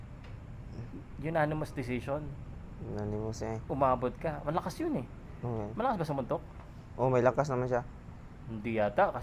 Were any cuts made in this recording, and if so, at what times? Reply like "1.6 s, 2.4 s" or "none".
none